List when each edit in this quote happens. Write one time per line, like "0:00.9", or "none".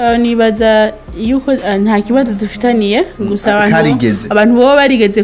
none